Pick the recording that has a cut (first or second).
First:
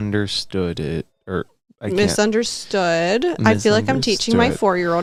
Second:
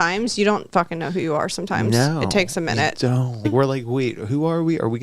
second